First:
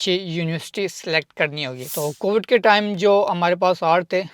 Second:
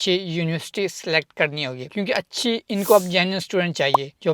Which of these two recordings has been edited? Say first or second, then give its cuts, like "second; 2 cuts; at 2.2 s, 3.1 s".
first; 1 cut; at 1.9 s